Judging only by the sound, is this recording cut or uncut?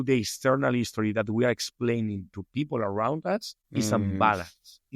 cut